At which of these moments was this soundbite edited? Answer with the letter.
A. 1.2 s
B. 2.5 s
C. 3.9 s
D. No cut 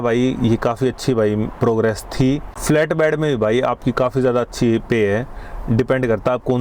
B